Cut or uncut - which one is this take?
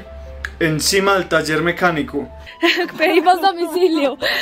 cut